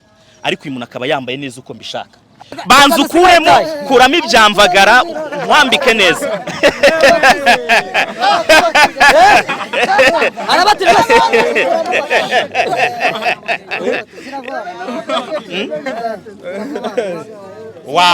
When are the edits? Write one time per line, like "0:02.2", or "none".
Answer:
0:02.5